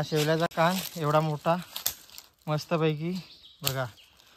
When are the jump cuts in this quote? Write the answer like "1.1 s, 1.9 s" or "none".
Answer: none